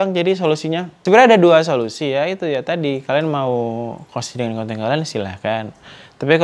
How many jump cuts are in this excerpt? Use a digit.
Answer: 1